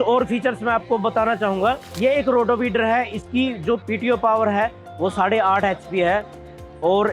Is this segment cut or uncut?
uncut